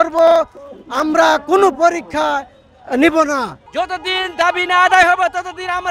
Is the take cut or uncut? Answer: cut